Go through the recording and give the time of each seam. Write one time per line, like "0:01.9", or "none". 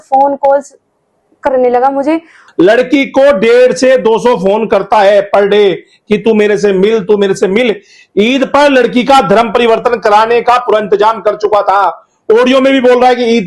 0:02.4